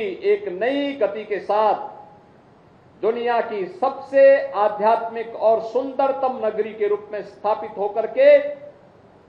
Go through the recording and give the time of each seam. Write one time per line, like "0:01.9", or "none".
none